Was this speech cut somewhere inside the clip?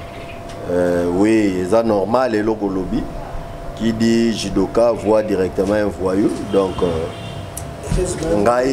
no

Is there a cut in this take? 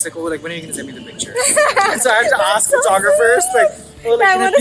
no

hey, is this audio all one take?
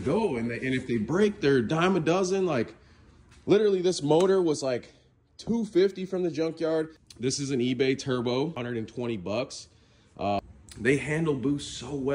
no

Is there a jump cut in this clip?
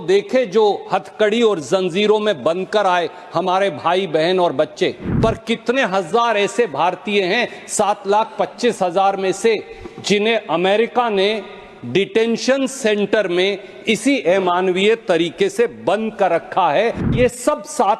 yes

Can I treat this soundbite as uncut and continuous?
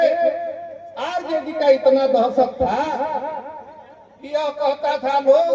yes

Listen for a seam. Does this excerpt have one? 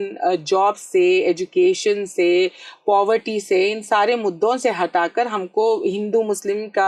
no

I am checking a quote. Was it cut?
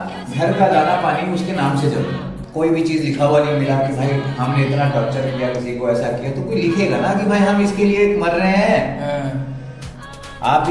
yes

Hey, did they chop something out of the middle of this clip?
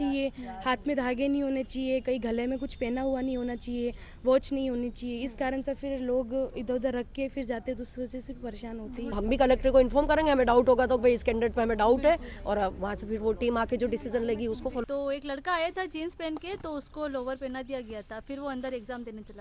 yes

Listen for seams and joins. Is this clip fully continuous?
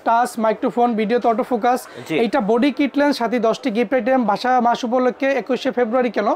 yes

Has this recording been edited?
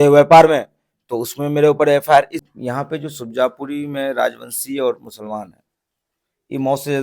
yes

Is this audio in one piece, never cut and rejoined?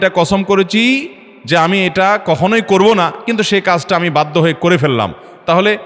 yes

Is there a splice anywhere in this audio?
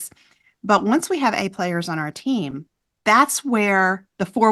no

